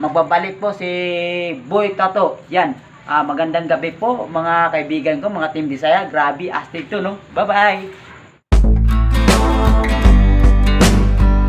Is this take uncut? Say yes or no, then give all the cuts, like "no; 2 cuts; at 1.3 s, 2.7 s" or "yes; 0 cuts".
yes; 0 cuts